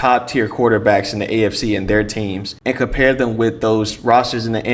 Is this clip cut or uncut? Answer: cut